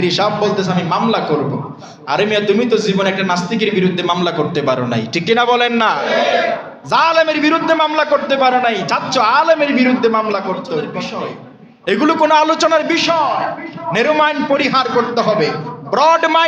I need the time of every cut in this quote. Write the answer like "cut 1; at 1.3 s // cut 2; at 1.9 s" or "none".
cut 1; at 11.0 s